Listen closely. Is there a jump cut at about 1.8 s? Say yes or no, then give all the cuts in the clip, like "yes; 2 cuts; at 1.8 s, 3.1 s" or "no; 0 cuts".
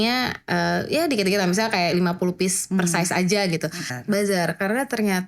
no; 1 cut; at 3.9 s